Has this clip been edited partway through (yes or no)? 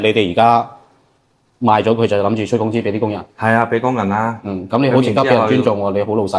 no